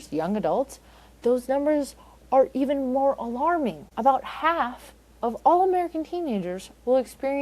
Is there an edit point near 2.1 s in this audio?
no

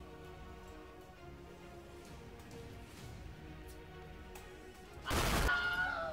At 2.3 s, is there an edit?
no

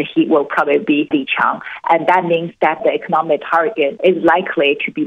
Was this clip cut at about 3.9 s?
yes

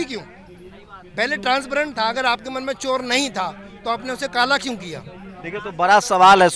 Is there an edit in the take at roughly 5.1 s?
no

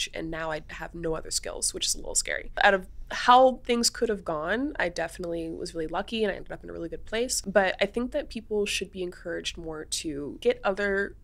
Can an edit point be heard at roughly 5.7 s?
no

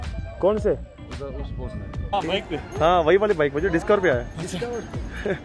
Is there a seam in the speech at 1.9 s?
yes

